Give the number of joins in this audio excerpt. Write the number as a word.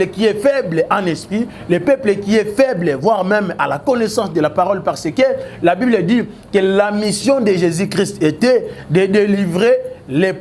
zero